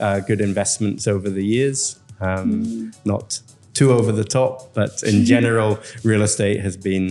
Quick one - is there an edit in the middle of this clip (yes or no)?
no